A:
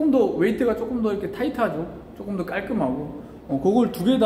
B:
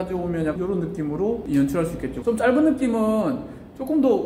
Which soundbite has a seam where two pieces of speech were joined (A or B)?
B